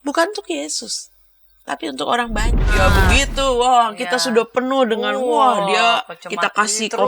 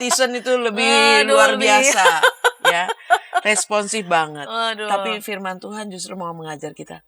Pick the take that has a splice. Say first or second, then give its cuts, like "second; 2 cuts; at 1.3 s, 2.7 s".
first; 1 cut; at 2.7 s